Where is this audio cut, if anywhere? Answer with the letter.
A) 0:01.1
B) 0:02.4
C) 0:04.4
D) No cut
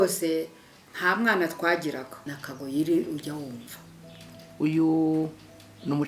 B